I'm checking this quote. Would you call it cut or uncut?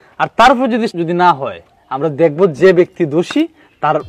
cut